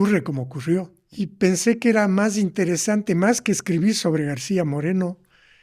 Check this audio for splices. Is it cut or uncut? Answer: cut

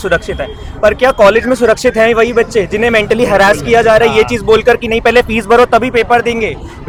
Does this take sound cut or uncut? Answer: uncut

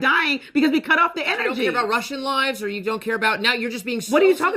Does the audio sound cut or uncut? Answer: uncut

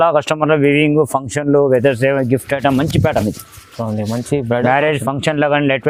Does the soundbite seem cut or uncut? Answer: uncut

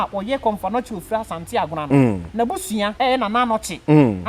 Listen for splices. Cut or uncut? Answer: cut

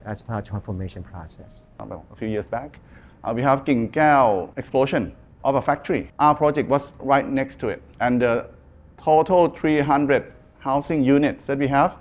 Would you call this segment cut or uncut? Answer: cut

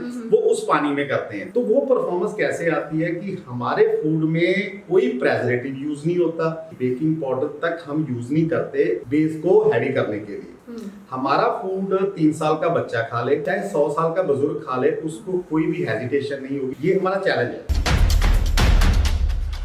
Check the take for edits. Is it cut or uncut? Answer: cut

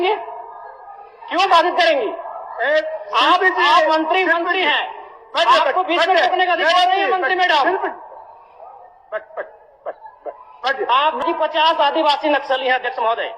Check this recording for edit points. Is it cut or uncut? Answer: cut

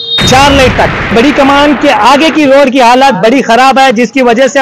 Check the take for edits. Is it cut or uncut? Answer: cut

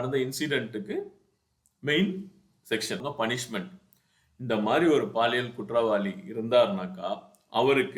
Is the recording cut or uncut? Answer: cut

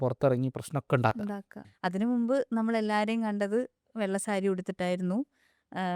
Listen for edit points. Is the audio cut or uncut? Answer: cut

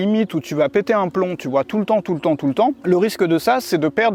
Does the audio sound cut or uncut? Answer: cut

